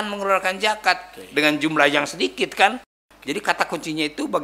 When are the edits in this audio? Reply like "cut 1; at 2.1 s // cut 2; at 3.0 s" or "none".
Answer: cut 1; at 2.9 s